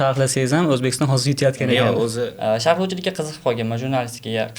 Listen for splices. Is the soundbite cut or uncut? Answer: cut